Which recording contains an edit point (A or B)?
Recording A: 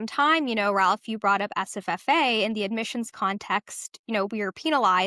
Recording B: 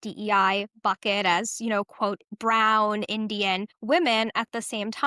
B